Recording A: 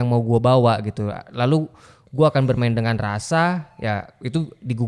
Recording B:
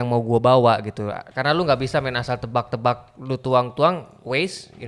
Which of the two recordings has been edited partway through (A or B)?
B